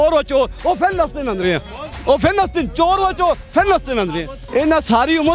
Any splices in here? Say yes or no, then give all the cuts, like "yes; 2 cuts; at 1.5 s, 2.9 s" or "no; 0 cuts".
yes; 1 cut; at 4.3 s